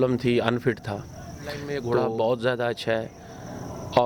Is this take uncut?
no; 1 cut; at 1.7 s

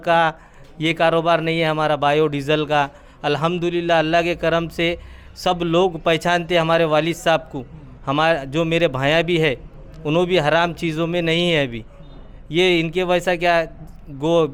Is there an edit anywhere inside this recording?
no; 0 cuts

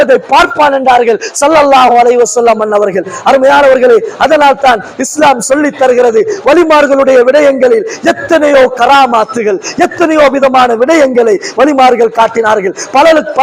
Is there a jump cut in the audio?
no; 0 cuts

